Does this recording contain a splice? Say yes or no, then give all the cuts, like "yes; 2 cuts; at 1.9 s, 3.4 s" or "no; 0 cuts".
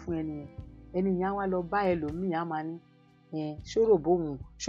no; 0 cuts